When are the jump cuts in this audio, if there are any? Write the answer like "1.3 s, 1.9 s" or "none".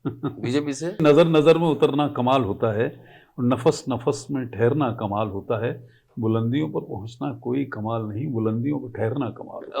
1.0 s